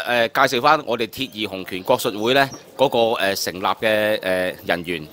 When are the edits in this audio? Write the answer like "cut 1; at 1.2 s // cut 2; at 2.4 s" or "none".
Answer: none